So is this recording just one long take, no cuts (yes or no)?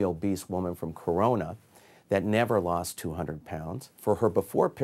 no